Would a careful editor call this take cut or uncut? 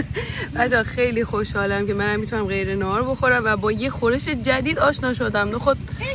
uncut